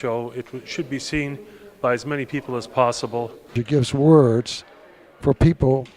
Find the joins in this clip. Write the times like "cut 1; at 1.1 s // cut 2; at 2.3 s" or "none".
cut 1; at 3.6 s